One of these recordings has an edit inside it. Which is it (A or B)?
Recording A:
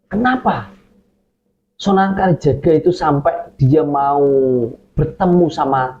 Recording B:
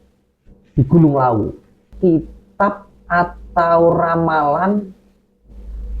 B